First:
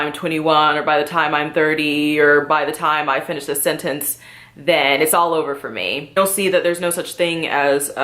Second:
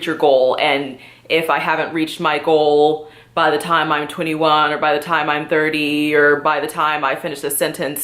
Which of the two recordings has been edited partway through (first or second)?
first